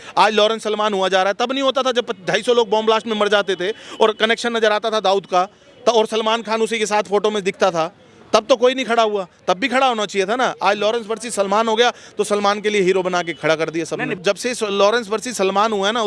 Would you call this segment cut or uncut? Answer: cut